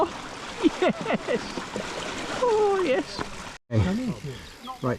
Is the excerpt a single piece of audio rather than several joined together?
no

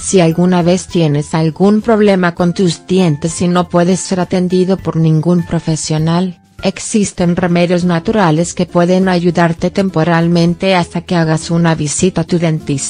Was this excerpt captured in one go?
yes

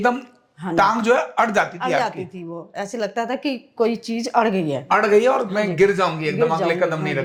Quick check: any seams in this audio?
no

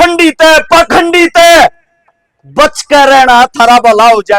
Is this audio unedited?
yes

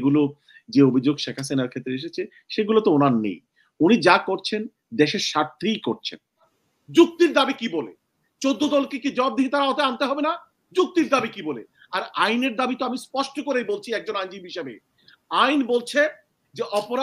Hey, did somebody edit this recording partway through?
yes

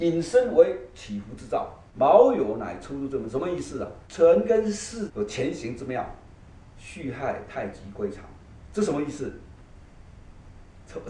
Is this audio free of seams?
yes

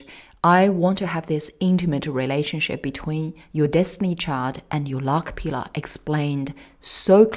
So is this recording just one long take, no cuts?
yes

